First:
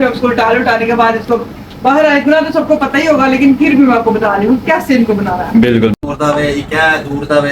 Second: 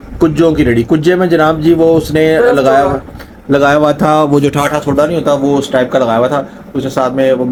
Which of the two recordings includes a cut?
first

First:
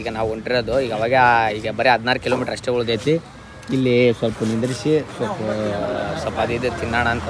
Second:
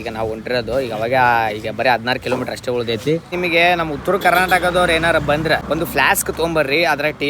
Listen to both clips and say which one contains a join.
second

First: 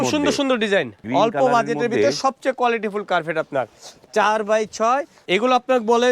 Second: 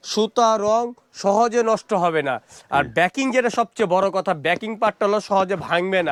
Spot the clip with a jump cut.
first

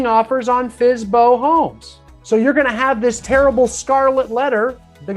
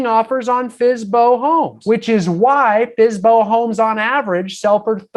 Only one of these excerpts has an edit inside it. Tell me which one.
second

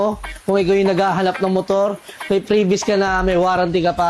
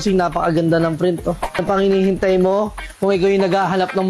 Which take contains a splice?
second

